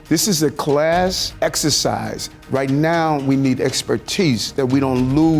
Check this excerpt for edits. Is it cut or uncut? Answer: cut